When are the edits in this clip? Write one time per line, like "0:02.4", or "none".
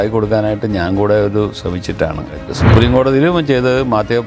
0:02.5